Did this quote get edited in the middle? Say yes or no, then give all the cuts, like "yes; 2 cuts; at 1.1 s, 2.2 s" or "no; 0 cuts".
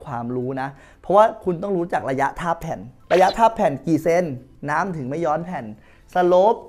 no; 0 cuts